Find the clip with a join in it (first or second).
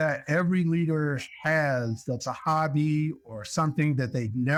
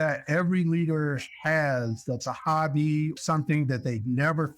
second